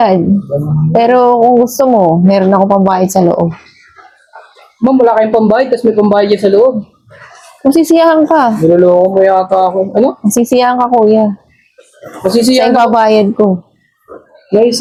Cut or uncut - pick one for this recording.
uncut